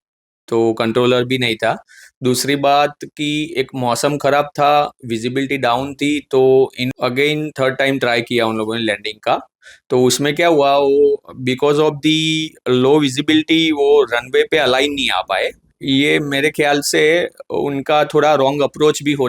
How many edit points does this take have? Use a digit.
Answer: 2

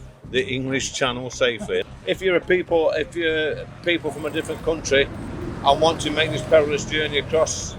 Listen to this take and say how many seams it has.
1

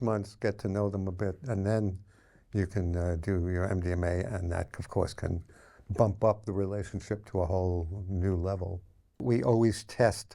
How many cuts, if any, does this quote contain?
1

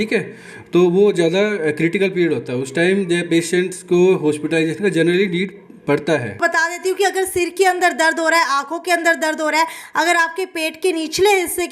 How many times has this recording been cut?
1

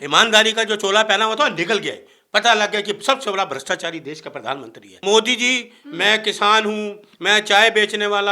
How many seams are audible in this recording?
1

